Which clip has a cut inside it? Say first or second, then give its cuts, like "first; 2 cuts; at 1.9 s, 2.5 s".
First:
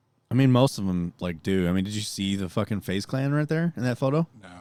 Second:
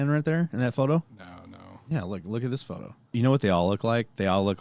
second; 1 cut; at 3.1 s